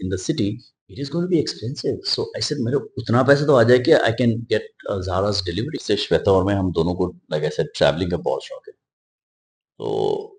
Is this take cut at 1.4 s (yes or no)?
no